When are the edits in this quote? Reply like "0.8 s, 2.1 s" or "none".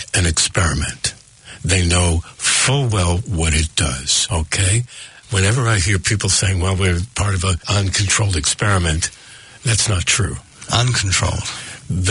4.3 s, 7.6 s